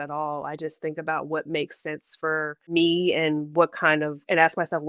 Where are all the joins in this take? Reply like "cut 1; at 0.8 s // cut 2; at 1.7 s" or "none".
cut 1; at 2.7 s